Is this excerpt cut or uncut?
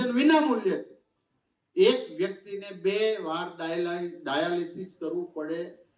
uncut